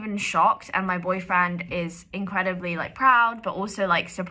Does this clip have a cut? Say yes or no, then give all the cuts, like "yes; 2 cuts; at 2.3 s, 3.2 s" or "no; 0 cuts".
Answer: no; 0 cuts